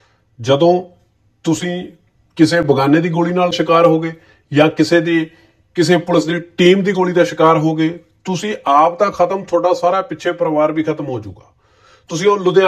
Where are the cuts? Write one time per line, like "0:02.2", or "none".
0:03.6